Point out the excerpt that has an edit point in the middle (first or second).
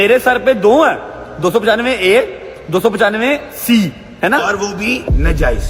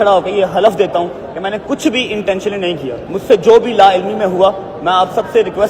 second